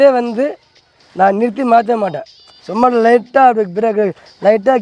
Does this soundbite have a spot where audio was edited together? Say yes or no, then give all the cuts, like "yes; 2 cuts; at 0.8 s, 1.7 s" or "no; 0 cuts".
no; 0 cuts